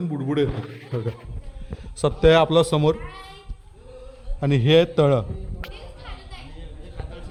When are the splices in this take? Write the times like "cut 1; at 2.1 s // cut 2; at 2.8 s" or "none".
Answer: none